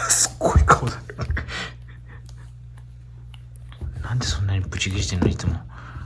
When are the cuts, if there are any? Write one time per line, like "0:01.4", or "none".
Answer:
none